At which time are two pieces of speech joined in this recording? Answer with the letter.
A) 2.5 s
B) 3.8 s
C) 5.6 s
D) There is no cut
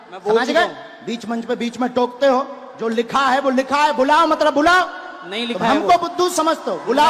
D